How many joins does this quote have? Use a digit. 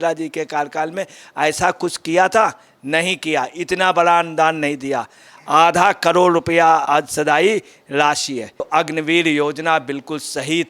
1